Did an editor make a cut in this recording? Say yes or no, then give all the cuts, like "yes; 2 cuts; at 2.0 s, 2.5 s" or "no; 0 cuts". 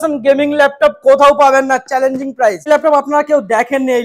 yes; 1 cut; at 2.7 s